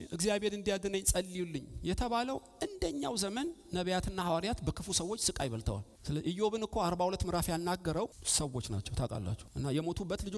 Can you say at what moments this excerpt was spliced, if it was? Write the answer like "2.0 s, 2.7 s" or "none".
5.9 s, 8.2 s, 9.4 s